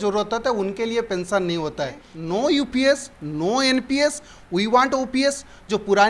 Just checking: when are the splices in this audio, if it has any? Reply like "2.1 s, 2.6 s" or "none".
2.1 s